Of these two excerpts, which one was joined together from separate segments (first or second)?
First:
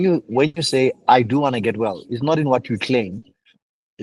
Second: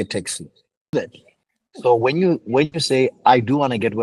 second